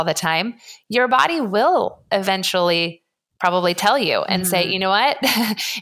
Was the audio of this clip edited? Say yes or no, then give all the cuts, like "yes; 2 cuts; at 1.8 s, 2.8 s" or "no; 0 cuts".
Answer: no; 0 cuts